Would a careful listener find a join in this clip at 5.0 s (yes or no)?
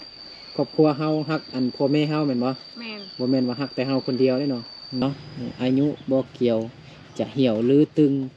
yes